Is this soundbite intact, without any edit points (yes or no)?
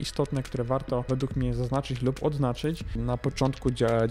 no